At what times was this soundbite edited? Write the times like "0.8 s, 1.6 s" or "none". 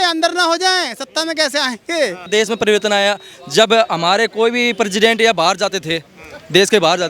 2.3 s